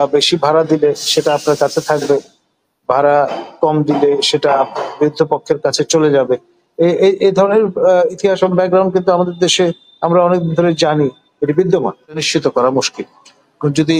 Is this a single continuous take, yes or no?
no